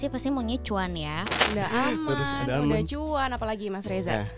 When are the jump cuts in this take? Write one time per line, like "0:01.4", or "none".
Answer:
0:01.4